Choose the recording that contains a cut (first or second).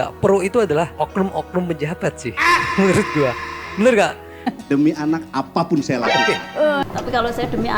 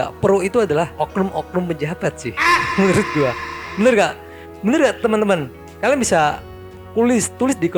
first